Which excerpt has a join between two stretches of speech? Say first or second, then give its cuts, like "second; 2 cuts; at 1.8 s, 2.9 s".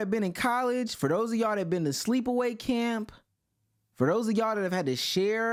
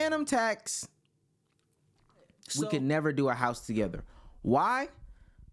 second; 1 cut; at 2.4 s